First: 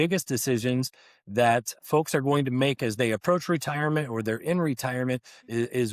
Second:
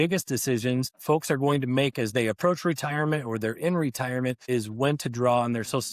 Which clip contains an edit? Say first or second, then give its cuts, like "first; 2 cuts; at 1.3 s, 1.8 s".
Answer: second; 2 cuts; at 0.9 s, 4.4 s